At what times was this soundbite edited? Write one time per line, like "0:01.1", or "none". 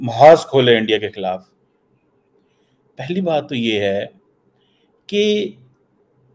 none